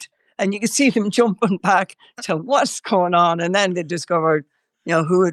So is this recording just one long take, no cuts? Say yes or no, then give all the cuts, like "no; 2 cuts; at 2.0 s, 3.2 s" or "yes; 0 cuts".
yes; 0 cuts